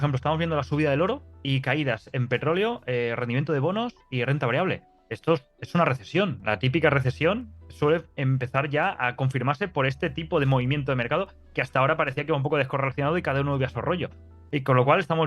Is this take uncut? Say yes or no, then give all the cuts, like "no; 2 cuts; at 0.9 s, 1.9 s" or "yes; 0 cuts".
yes; 0 cuts